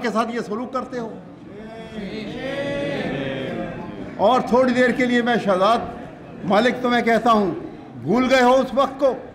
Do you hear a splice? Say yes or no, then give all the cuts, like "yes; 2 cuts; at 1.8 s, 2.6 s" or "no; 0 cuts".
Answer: no; 0 cuts